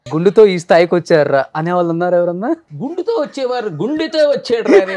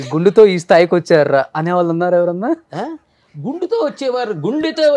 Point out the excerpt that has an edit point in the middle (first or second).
first